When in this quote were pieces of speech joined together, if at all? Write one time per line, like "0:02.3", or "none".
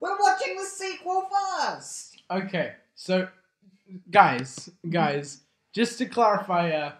none